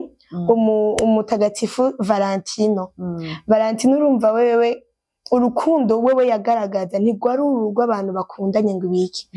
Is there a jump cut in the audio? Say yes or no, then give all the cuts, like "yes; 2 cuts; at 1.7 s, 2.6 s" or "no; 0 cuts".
no; 0 cuts